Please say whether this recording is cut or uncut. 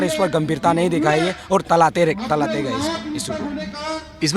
uncut